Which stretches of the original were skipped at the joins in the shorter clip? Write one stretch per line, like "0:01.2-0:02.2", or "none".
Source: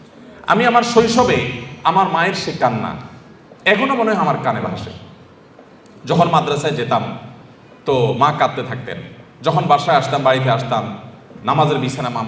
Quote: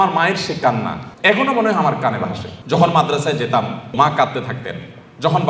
0:03.0-0:03.5
0:04.9-0:05.9
0:07.3-0:08.2